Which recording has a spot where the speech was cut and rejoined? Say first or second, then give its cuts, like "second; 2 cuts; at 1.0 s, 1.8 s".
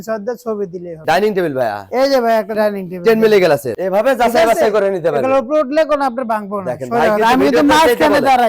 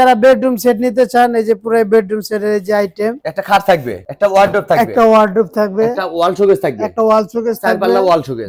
first; 2 cuts; at 1.0 s, 3.7 s